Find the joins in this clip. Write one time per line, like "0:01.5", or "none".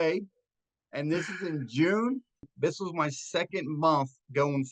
0:02.5